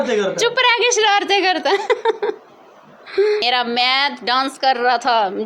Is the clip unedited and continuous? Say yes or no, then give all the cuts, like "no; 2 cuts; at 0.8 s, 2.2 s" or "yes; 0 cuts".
no; 1 cut; at 3.4 s